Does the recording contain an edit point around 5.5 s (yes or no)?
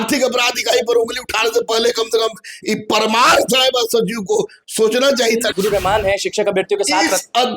yes